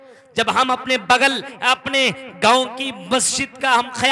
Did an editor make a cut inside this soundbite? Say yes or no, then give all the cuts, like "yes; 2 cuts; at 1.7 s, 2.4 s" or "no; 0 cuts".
yes; 1 cut; at 1.5 s